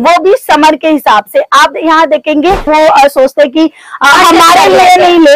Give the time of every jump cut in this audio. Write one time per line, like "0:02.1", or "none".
0:02.7